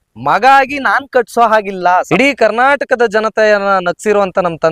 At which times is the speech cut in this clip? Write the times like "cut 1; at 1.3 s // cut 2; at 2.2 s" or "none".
cut 1; at 2.1 s

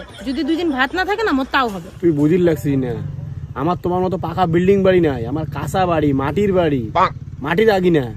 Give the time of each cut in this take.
cut 1; at 1.9 s

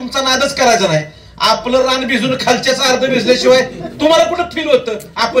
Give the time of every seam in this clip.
none

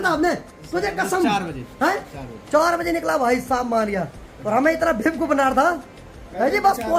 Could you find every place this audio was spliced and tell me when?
none

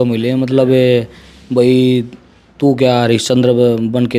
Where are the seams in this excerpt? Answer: none

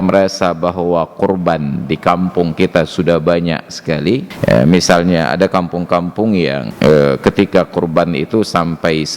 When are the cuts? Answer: cut 1; at 4.3 s // cut 2; at 6.7 s

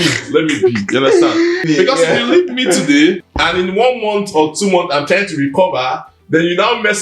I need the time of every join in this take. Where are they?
cut 1; at 1.6 s // cut 2; at 3.3 s

